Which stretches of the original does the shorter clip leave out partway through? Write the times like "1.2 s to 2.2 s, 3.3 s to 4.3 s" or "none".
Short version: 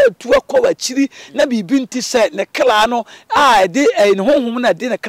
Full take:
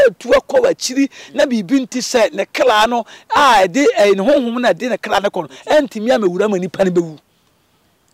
none